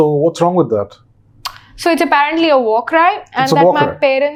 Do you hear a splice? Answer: no; 0 cuts

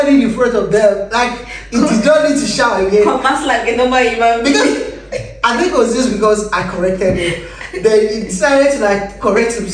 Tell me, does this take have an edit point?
no; 0 cuts

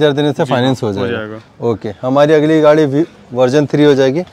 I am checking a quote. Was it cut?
no; 0 cuts

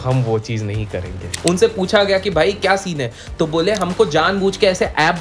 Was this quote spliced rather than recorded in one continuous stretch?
yes; 1 cut; at 1.3 s

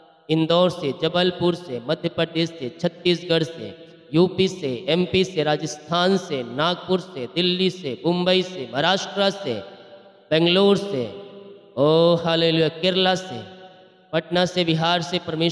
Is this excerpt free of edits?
yes; 0 cuts

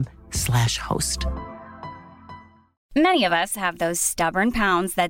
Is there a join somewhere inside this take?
yes; 1 cut; at 2.7 s

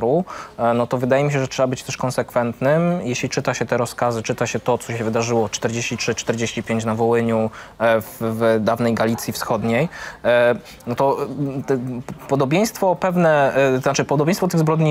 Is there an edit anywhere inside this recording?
no; 0 cuts

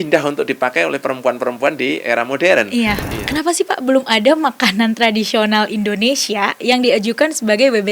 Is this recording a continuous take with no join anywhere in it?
no; 1 cut; at 3.0 s

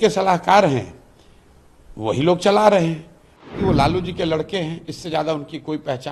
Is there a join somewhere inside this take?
yes; 1 cut; at 3.5 s

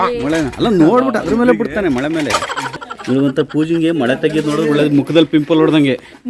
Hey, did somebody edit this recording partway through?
yes; 1 cut; at 2.6 s

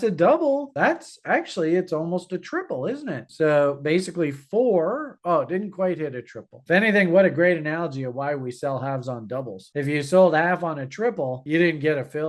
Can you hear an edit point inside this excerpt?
no; 0 cuts

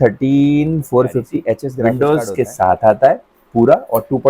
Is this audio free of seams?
no; 1 cut; at 1.7 s

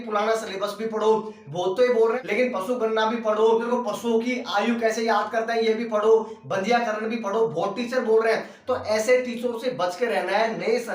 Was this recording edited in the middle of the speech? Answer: yes; 2 cuts; at 2.2 s, 3.7 s

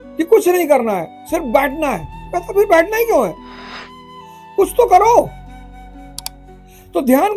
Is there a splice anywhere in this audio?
no; 0 cuts

